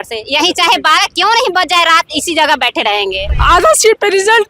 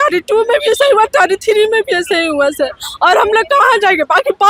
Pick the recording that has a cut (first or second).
first